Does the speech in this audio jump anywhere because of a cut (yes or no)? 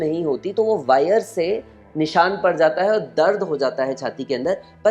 no